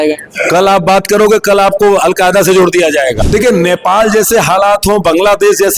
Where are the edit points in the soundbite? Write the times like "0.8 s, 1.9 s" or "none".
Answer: 3.2 s